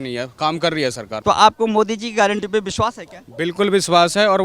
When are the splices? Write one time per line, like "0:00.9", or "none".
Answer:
0:01.1